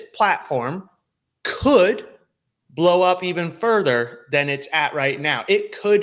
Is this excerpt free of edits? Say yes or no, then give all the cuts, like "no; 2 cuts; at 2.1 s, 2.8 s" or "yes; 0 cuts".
yes; 0 cuts